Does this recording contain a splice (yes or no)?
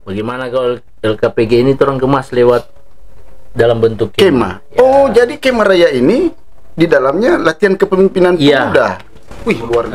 no